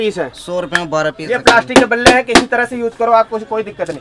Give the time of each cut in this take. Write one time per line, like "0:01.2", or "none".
0:01.2

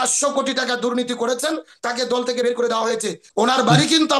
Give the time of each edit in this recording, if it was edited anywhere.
0:03.2

